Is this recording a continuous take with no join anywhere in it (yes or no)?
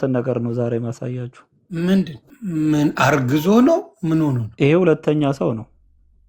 no